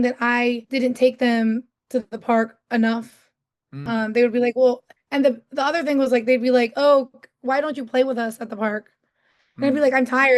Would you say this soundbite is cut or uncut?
uncut